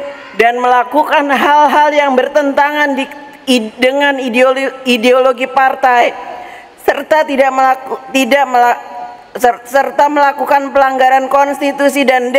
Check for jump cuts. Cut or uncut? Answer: uncut